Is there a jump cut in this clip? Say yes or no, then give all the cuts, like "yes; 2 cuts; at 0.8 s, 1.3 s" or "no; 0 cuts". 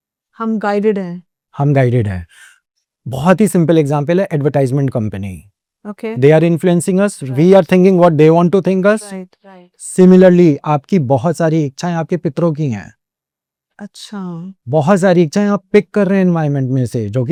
no; 0 cuts